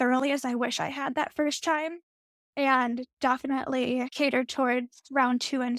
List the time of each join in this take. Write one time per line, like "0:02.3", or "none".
none